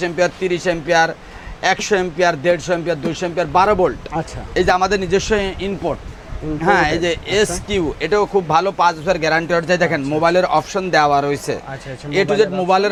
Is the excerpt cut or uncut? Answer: uncut